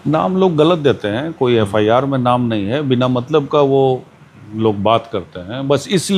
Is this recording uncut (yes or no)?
yes